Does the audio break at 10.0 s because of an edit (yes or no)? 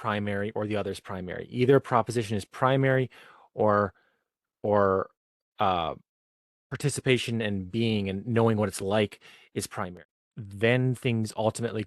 yes